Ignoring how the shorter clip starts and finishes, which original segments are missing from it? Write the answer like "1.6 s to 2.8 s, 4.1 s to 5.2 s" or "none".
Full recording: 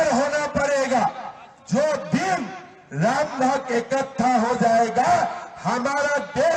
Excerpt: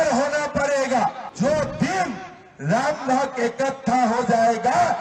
1.2 s to 1.6 s